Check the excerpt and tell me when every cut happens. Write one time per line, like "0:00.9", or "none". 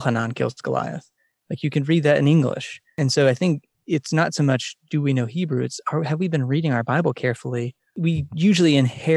0:02.8
0:08.0

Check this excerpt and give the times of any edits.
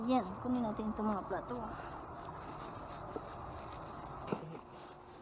0:04.3

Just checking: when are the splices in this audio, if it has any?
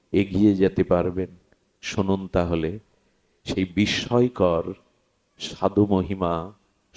none

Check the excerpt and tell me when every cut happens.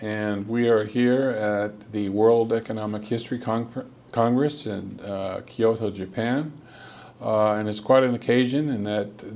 0:04.9

